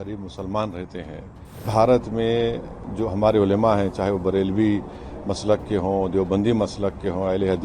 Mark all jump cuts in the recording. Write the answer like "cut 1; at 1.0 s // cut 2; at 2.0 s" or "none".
cut 1; at 1.7 s